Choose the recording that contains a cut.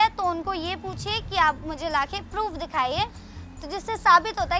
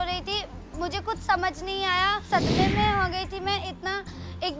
second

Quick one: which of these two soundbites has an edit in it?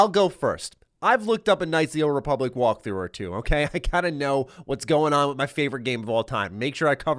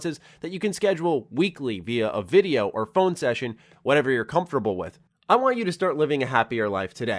second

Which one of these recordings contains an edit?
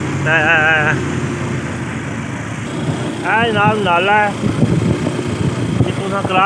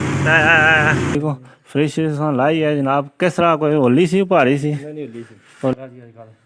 second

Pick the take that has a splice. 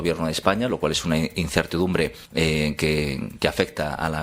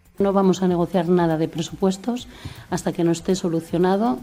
first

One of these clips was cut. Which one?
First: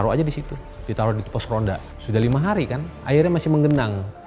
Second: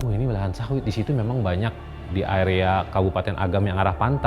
first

